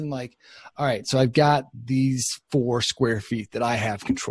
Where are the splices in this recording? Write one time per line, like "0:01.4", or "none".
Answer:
none